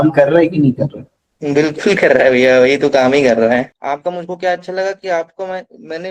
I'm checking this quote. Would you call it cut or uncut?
cut